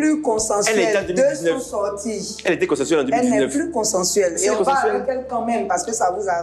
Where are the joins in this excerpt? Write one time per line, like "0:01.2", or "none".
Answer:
none